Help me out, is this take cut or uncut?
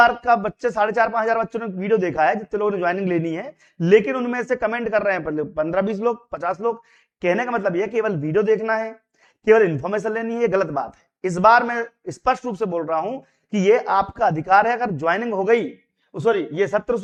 uncut